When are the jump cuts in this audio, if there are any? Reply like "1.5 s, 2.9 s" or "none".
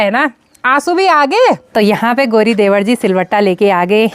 1.6 s